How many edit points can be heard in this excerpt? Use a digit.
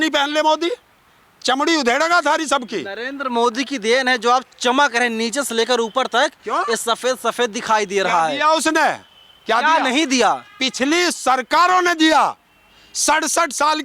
0